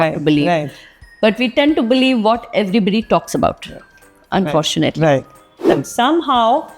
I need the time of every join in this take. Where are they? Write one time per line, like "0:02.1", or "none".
0:05.7

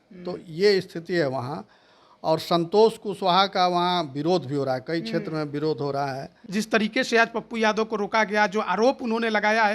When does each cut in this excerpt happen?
0:06.4

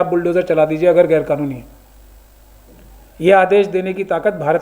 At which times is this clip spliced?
none

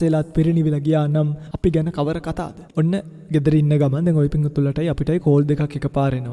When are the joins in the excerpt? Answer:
0:01.4
0:02.5

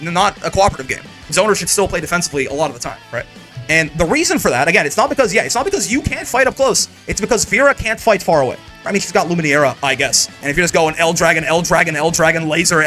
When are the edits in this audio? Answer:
0:01.2
0:08.9
0:10.3

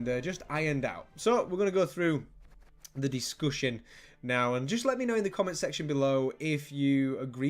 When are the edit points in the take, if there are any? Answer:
0:01.0

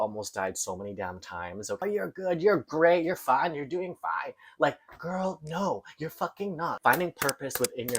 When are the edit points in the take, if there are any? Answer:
0:01.8
0:06.8

